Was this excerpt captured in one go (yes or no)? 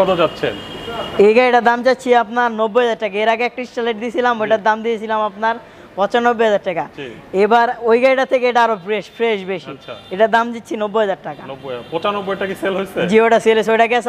yes